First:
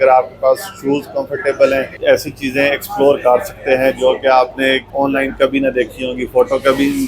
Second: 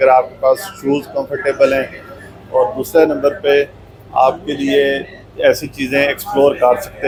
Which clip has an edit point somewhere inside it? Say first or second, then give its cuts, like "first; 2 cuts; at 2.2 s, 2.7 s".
first; 2 cuts; at 1.9 s, 4.9 s